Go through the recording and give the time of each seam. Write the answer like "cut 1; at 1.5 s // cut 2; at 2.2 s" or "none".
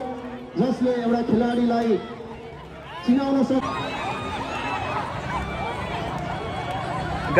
cut 1; at 3.7 s